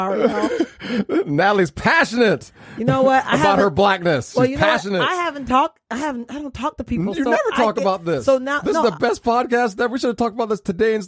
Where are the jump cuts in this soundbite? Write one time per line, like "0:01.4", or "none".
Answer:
none